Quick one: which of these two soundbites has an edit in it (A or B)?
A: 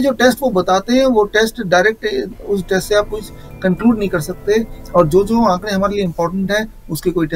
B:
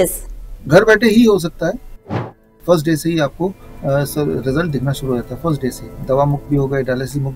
B